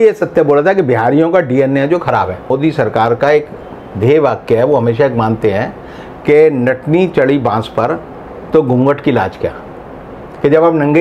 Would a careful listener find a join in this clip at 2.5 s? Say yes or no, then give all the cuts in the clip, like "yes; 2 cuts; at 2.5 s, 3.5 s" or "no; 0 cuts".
yes; 1 cut; at 2.5 s